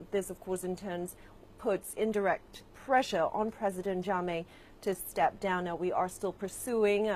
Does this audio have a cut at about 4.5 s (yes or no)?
no